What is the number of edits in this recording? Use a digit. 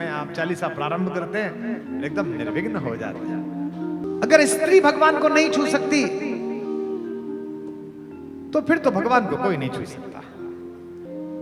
1